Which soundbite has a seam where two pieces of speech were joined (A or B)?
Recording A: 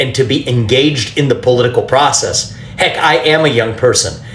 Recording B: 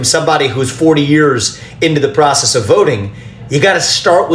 A